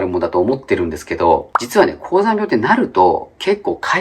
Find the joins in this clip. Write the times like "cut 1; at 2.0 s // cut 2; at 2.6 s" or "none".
cut 1; at 1.6 s